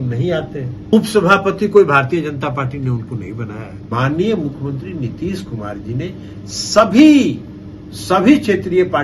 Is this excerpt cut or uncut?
cut